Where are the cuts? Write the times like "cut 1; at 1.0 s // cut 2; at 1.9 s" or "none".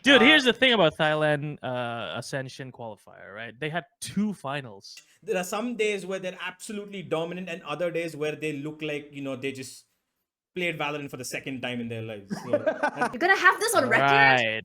cut 1; at 5.1 s // cut 2; at 13.1 s